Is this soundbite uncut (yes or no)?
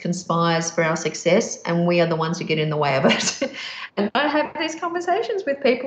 no